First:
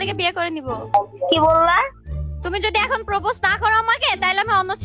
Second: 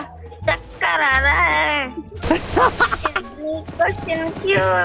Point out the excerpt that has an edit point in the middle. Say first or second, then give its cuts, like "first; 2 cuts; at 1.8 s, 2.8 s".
first; 1 cut; at 0.9 s